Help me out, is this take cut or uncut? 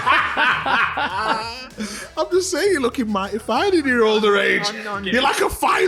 uncut